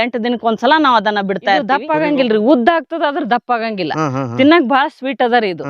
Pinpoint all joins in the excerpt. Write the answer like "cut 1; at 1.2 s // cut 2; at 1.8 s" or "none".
cut 1; at 1.8 s

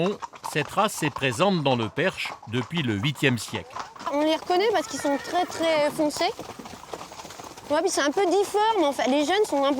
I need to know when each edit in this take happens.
cut 1; at 4.1 s

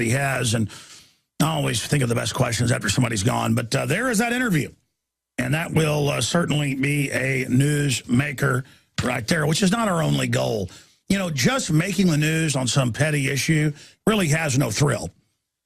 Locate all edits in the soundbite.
none

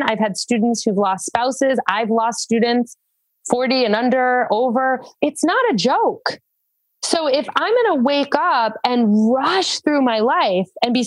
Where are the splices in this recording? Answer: cut 1; at 5.1 s

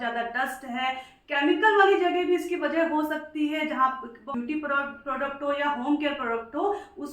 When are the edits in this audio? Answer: cut 1; at 4.3 s

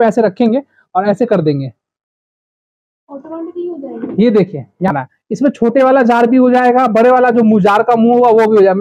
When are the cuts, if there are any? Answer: cut 1; at 4.9 s

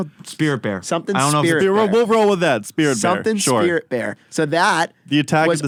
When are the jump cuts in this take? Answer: none

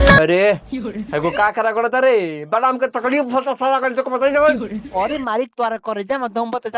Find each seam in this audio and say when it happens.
none

